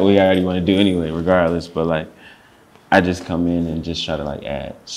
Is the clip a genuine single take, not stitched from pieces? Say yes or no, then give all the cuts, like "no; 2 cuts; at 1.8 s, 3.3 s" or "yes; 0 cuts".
yes; 0 cuts